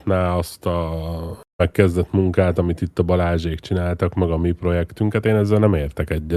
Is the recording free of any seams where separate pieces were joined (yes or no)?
yes